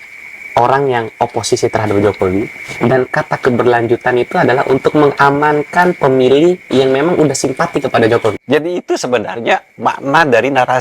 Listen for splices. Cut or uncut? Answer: cut